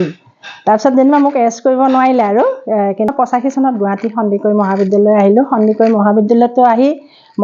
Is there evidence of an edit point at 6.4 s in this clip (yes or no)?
no